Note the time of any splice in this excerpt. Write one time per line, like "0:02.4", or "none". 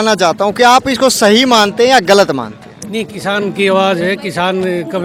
none